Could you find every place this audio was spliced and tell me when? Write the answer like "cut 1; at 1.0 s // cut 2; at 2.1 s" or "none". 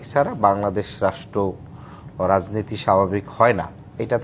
none